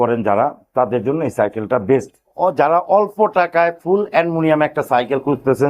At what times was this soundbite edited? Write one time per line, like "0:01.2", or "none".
0:02.3